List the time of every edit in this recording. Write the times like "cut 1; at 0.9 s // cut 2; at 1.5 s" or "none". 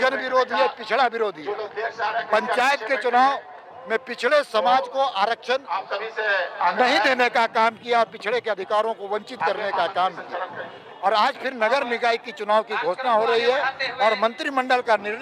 none

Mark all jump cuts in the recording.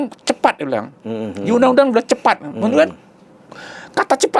none

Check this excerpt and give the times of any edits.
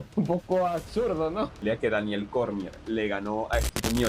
cut 1; at 1.6 s

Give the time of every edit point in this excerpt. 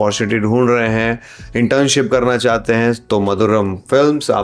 none

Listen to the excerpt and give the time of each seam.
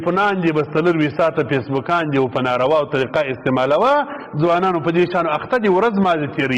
none

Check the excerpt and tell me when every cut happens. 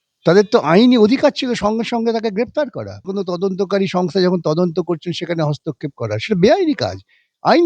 cut 1; at 3.1 s

